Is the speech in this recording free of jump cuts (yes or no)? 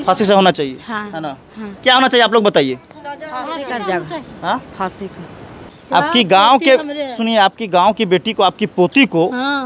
no